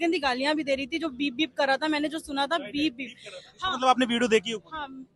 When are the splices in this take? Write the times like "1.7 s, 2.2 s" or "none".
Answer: none